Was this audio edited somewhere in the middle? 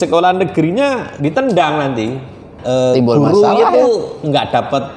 no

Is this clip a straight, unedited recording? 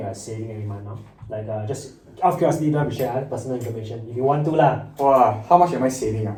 yes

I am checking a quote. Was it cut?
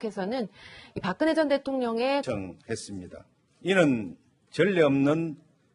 no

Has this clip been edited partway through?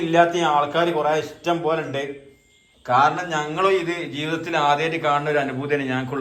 no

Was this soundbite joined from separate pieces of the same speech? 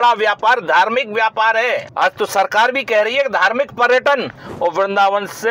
yes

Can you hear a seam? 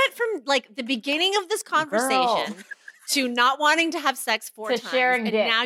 no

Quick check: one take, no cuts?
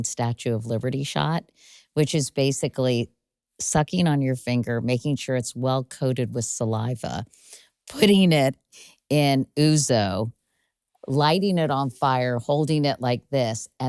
yes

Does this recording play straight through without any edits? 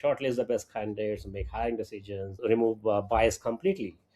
no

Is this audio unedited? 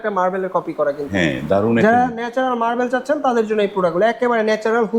yes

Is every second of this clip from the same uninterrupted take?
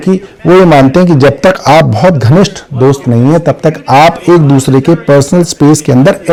yes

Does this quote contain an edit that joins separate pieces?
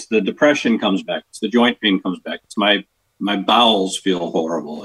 no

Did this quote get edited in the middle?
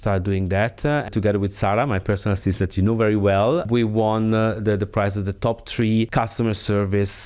yes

